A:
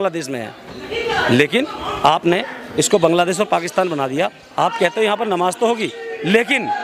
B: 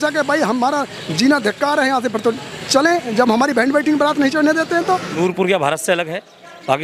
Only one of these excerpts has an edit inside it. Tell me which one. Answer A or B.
B